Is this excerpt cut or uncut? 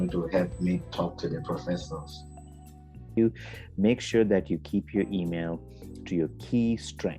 cut